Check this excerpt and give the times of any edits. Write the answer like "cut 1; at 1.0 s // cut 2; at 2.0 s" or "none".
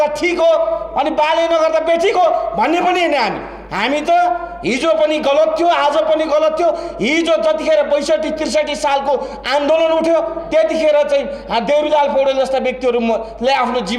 none

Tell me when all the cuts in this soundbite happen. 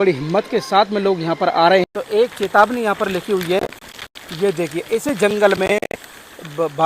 cut 1; at 2.0 s

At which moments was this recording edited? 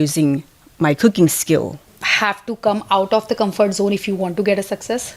cut 1; at 2.0 s

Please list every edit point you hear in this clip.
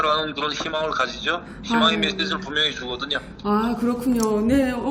none

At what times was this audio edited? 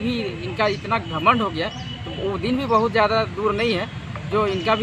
none

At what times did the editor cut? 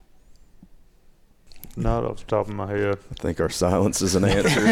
cut 1; at 1.4 s

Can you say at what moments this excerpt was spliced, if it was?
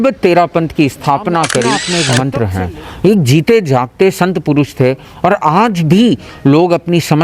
cut 1; at 2.0 s

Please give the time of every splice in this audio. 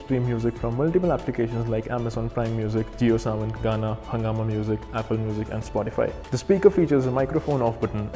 cut 1; at 6.2 s

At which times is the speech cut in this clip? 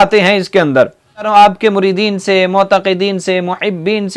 cut 1; at 1.3 s

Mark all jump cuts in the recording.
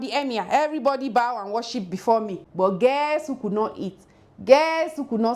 cut 1; at 2.4 s

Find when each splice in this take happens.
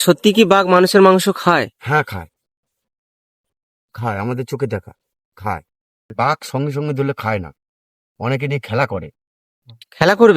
cut 1; at 6.1 s

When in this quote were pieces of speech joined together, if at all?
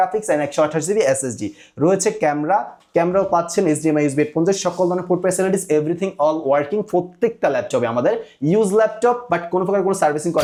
none

